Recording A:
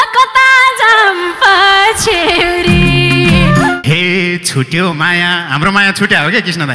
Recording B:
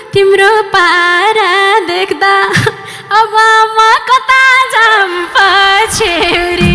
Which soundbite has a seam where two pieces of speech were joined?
A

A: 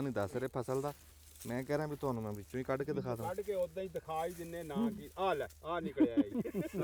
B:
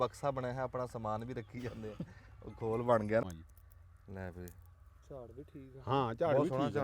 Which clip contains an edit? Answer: B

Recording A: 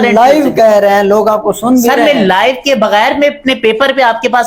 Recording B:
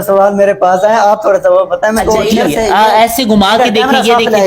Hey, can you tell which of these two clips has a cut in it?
B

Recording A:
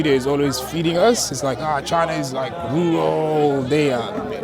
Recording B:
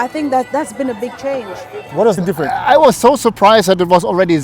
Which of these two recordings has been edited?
B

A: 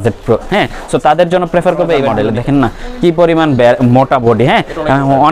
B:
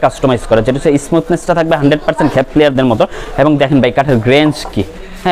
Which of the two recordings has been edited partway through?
A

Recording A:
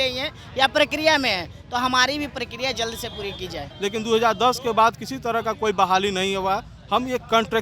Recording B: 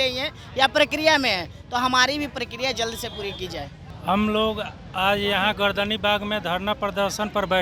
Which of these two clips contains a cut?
A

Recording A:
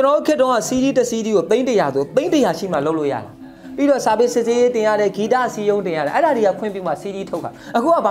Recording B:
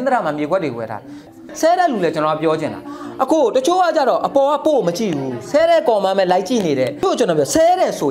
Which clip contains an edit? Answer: B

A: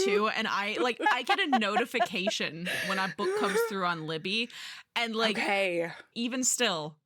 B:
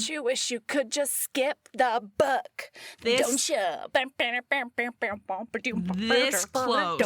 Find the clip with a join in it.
A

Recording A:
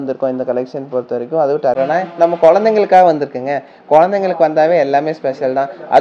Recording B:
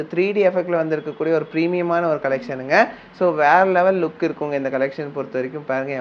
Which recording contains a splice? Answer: A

